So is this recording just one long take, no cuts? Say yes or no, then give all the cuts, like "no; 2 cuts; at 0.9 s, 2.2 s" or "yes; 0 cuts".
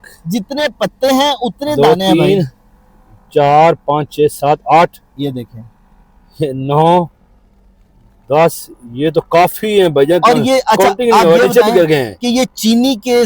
yes; 0 cuts